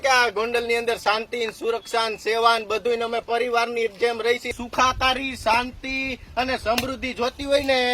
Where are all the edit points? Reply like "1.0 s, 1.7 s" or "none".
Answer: 4.6 s